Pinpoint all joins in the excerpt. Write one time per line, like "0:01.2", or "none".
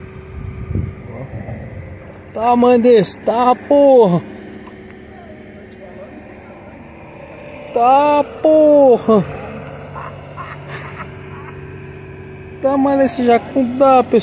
none